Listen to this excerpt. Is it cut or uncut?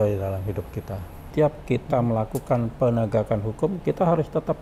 cut